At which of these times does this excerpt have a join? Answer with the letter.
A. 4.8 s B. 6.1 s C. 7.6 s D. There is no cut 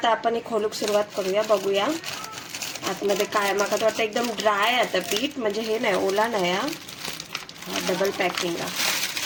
D